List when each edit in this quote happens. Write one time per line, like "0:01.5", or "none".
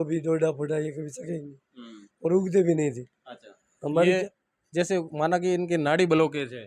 0:04.1